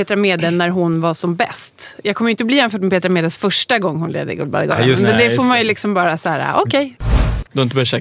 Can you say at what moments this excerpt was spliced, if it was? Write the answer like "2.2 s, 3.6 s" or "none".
7.0 s